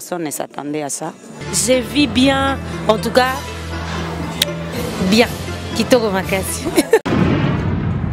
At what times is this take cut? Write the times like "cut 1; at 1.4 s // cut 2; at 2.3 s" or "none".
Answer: cut 1; at 1.4 s